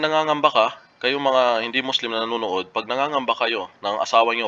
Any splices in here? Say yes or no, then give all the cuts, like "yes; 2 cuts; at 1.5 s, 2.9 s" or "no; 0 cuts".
no; 0 cuts